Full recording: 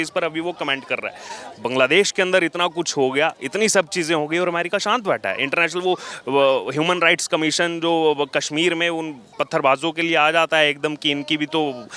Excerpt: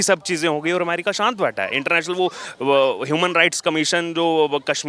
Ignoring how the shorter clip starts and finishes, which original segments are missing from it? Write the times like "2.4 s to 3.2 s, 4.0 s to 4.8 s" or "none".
none

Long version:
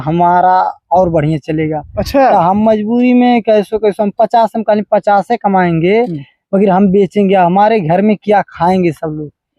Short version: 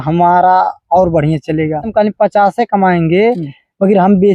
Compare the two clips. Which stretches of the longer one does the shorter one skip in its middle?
1.9 s to 4.6 s

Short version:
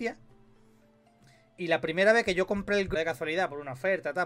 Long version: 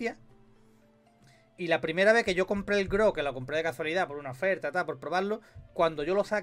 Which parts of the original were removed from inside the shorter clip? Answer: 2.9 s to 3.5 s

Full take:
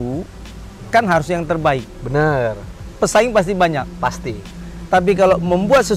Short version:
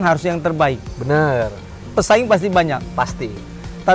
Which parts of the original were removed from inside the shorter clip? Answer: none

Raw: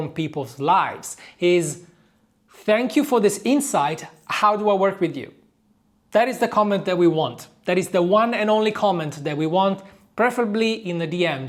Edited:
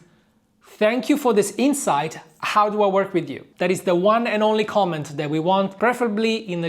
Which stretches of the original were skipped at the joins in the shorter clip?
5.3 s to 7.5 s, 9.8 s to 10.1 s

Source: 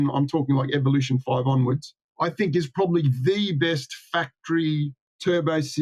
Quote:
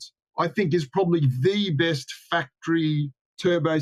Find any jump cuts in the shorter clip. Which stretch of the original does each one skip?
none

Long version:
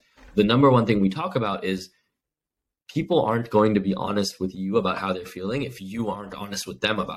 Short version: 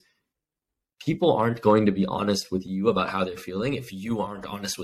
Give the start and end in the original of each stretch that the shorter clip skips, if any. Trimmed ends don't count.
none

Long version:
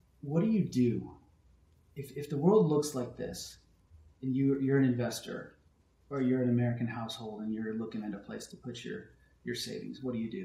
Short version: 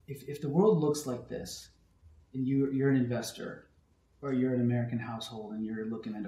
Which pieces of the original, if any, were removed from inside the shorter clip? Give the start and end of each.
none

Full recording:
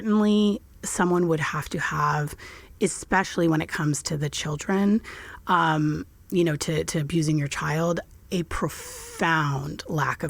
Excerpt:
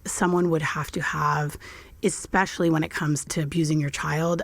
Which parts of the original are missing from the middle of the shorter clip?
4.1 s to 6.9 s

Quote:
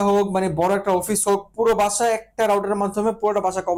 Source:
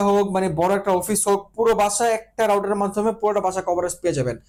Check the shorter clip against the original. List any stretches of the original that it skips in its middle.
none

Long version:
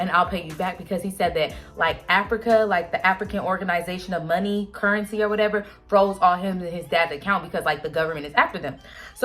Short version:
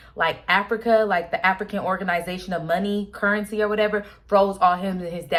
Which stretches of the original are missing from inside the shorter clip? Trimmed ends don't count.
none

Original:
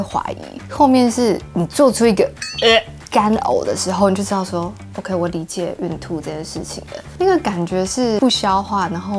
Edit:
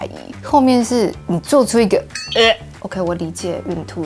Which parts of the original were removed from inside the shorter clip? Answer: 3.0 s to 4.8 s

